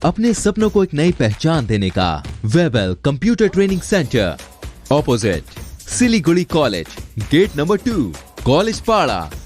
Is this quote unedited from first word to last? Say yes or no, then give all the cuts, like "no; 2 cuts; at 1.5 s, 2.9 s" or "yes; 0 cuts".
no; 1 cut; at 2.3 s